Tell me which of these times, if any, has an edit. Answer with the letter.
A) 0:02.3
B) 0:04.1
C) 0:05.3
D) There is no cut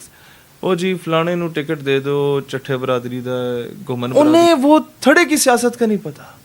B